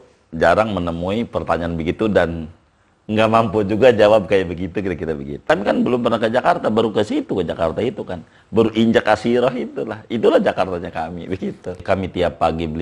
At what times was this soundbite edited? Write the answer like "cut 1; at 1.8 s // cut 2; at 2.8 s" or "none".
cut 1; at 5.5 s // cut 2; at 11.8 s

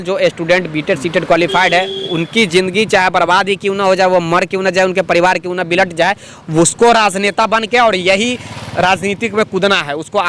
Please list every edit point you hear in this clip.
none

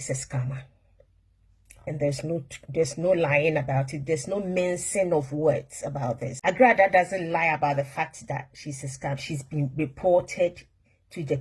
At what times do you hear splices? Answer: cut 1; at 6.3 s

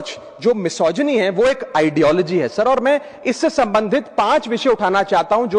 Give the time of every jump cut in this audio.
none

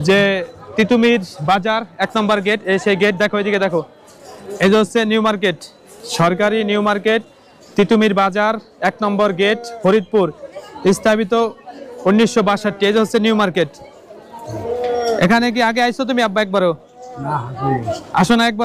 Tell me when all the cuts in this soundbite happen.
none

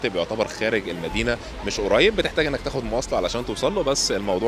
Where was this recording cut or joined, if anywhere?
none

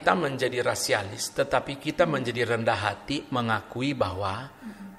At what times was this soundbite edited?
none

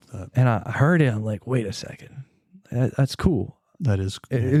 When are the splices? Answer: none

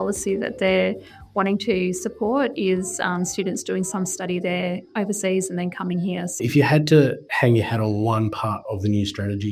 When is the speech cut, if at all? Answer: cut 1; at 6.3 s

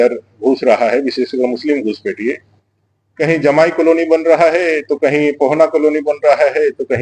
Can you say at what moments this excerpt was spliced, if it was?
none

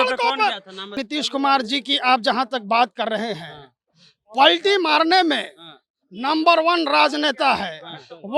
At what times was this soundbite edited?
cut 1; at 1.0 s

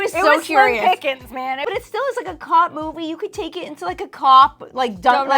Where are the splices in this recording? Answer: cut 1; at 1.7 s

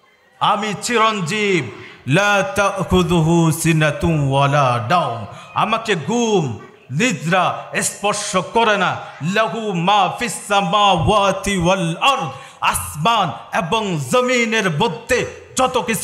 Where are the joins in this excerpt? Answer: none

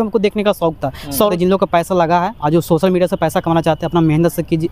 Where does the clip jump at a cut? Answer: cut 1; at 1.3 s

